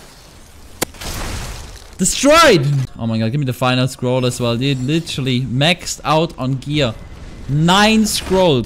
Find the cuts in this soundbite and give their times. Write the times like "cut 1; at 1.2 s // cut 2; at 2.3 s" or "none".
cut 1; at 2.9 s